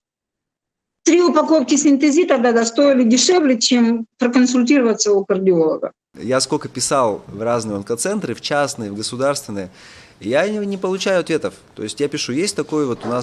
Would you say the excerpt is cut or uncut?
cut